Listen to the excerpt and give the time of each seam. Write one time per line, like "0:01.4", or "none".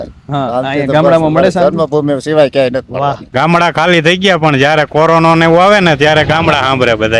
0:03.2